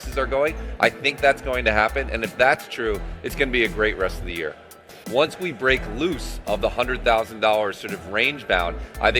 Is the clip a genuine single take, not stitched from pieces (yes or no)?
no